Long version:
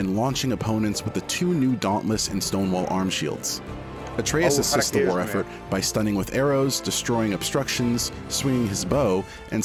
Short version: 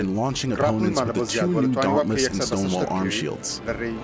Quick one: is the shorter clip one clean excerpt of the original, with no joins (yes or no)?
yes